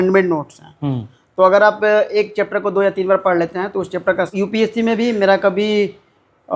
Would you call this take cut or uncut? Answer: cut